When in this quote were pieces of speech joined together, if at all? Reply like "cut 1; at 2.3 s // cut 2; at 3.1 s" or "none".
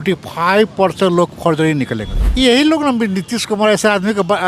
cut 1; at 2.2 s